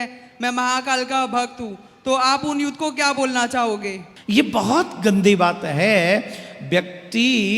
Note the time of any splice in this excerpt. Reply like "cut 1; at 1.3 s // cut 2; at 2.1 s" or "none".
cut 1; at 4.1 s